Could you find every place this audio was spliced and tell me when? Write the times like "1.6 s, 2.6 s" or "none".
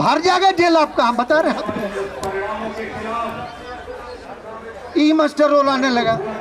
4.2 s